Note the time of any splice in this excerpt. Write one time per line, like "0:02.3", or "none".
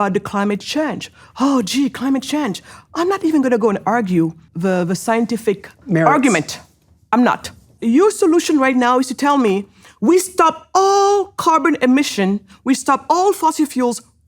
0:04.5
0:05.8
0:07.8